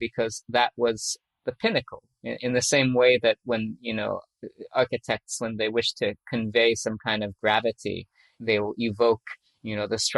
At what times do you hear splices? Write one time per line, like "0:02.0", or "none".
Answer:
0:01.2
0:02.0
0:04.3
0:08.2